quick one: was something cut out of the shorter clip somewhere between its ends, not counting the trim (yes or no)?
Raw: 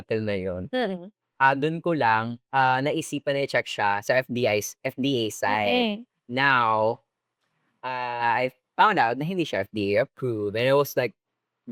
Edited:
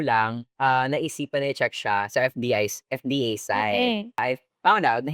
yes